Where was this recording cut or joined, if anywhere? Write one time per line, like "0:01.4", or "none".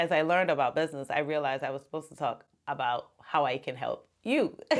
none